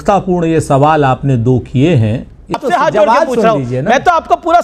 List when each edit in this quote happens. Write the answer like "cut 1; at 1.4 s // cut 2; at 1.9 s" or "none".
cut 1; at 2.6 s